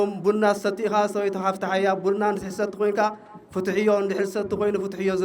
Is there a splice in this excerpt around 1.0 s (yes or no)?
no